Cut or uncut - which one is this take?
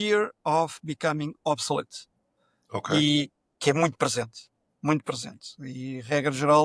uncut